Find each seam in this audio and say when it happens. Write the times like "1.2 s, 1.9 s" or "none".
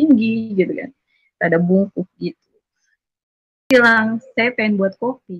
3.7 s